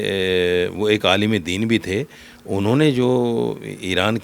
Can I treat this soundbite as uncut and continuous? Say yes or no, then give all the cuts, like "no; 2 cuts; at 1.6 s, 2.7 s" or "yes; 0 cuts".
yes; 0 cuts